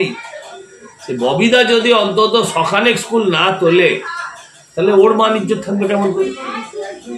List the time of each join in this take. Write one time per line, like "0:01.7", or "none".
none